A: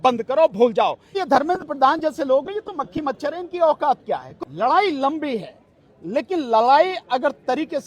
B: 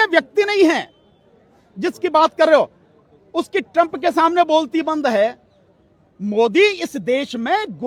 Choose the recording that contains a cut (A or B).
A